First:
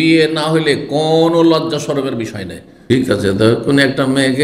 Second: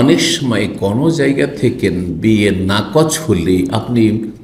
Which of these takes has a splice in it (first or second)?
first